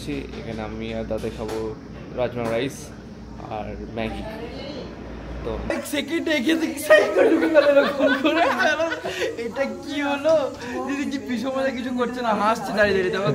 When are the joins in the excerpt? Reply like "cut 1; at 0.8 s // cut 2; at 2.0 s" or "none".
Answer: cut 1; at 5.7 s